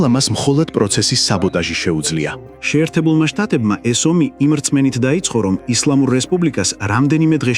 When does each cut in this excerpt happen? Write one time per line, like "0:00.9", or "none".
0:02.4